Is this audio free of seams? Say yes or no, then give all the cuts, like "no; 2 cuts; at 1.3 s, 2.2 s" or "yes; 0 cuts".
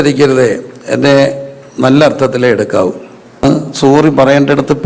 no; 1 cut; at 3.4 s